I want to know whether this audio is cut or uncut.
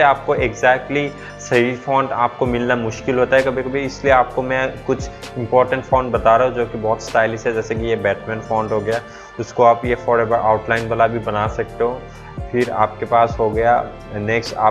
uncut